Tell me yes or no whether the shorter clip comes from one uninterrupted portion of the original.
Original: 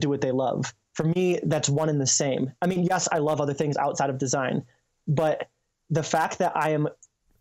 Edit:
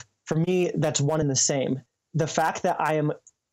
no